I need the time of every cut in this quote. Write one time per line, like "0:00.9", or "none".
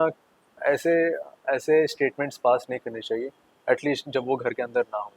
none

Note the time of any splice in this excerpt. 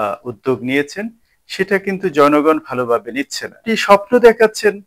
0:03.7

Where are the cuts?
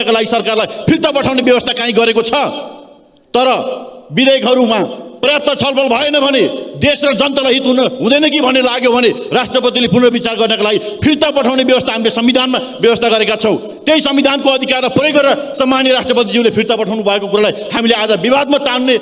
none

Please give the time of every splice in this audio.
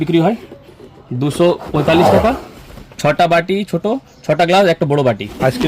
none

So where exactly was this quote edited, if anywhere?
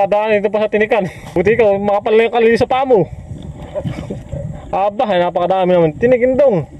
0:01.3

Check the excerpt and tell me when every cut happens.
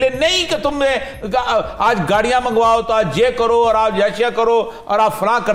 none

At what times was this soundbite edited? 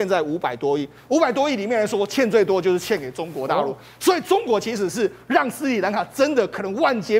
none

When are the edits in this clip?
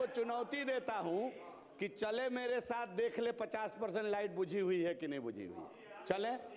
none

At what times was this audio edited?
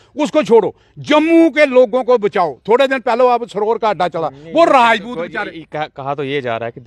none

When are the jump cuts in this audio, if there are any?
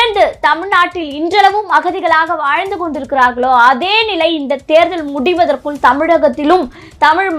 none

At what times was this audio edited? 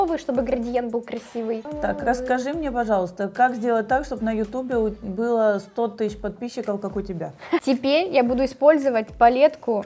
0:01.7
0:07.6

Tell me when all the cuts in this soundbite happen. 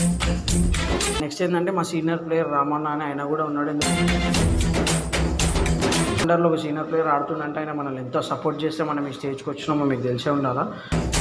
0:01.2
0:06.2

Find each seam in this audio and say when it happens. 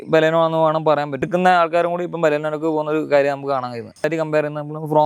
0:01.3
0:04.1

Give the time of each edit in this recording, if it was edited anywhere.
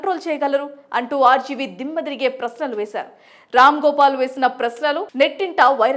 0:05.1

